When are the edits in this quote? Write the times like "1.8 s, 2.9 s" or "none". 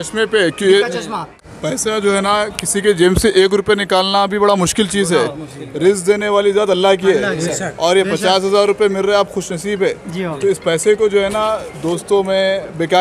1.3 s